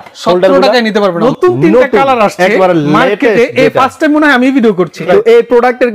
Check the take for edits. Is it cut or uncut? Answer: cut